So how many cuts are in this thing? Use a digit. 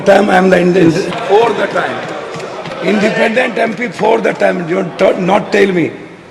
1